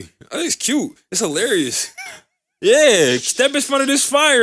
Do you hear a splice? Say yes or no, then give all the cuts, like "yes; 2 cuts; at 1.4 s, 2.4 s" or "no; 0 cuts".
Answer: no; 0 cuts